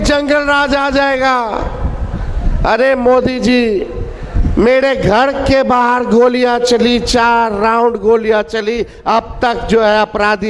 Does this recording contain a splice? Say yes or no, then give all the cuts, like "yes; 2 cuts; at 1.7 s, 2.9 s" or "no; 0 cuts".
no; 0 cuts